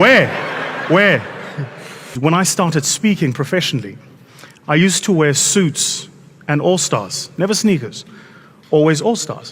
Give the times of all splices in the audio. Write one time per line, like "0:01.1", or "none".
0:02.2